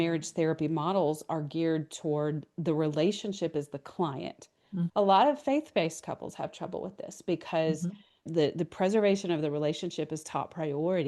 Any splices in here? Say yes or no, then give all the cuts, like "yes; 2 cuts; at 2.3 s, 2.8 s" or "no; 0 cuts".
yes; 2 cuts; at 4.9 s, 8.3 s